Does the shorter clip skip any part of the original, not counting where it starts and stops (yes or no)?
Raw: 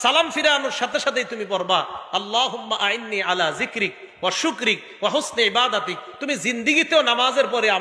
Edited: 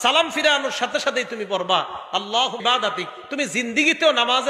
yes